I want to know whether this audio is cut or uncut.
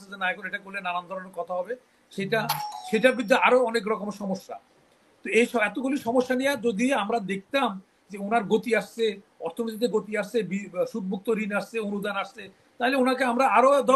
uncut